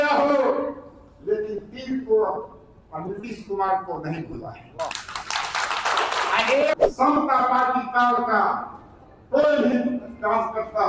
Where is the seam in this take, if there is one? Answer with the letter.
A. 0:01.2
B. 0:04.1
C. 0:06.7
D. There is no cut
C